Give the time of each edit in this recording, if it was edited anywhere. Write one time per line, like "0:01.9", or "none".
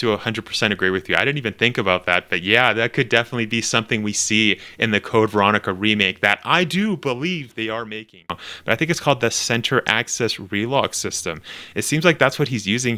0:08.5